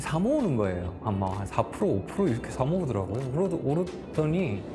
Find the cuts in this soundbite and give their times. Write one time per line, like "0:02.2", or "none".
none